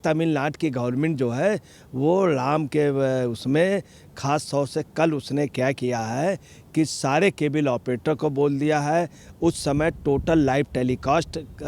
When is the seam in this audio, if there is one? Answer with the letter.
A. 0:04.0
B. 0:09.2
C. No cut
C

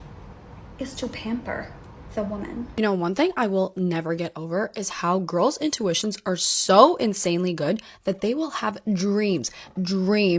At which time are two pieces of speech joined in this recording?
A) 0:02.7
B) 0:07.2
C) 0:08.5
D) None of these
A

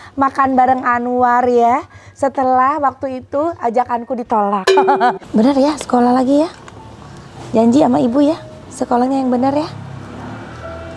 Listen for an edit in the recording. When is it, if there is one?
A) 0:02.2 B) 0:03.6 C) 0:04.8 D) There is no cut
C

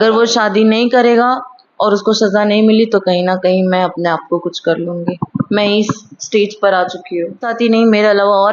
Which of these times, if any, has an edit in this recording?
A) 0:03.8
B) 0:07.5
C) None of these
B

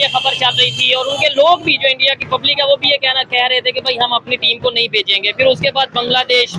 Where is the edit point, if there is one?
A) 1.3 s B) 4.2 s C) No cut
C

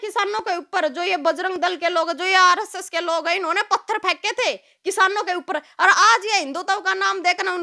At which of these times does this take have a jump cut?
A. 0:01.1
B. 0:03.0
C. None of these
C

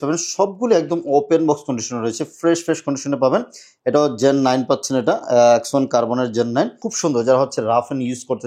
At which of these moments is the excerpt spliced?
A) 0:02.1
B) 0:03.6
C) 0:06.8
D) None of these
C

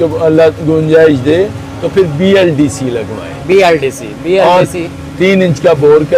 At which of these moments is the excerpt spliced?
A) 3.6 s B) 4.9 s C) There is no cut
C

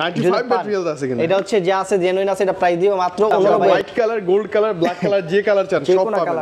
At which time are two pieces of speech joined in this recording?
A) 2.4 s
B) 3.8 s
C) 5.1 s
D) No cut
B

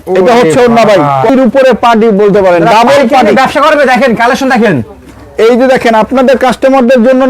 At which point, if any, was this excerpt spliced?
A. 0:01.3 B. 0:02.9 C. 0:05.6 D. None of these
A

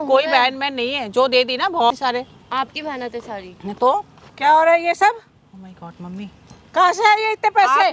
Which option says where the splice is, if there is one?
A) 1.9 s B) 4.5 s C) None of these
A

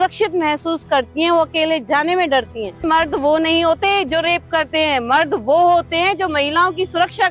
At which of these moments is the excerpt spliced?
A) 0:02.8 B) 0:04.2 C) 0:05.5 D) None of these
A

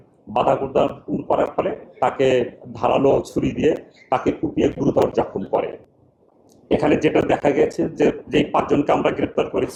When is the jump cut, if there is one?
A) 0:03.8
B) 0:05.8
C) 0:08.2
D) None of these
D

